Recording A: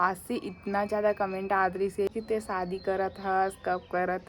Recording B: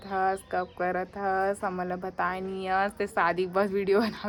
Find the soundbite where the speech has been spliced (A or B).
A